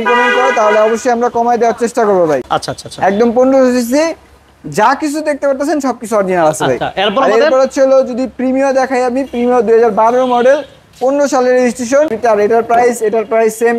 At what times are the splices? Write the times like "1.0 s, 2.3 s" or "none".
2.4 s, 12.2 s

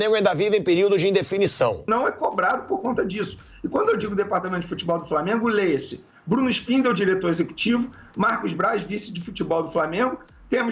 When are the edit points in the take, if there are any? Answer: 1.9 s

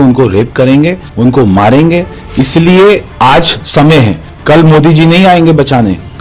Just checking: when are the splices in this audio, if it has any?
1.0 s, 2.2 s, 4.3 s

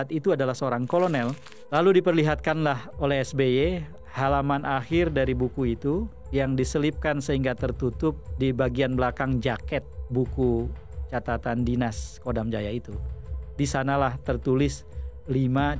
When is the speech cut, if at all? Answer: 1.5 s

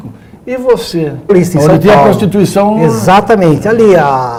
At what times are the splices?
none

